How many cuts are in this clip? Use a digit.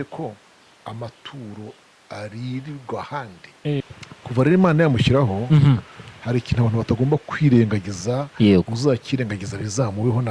1